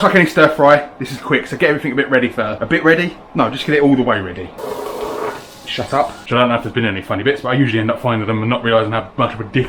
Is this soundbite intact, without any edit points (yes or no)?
no